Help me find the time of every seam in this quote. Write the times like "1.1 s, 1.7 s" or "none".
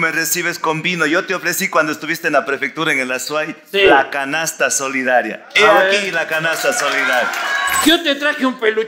7.8 s